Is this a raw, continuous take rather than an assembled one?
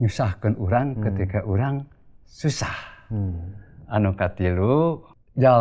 yes; 0 cuts

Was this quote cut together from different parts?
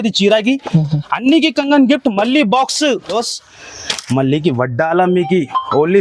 yes; 1 cut; at 3.2 s

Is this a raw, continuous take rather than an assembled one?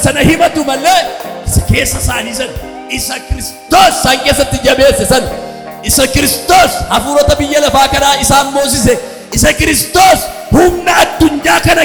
yes; 0 cuts

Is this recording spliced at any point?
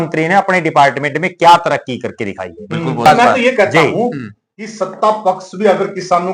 yes; 1 cut; at 3.0 s

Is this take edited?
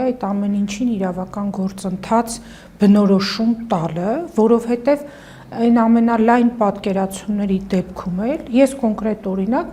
no; 0 cuts

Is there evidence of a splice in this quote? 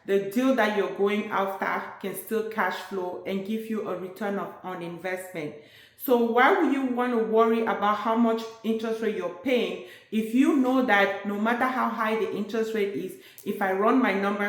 no; 0 cuts

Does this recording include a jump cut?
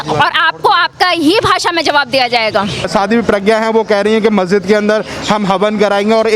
yes; 1 cut; at 2.9 s

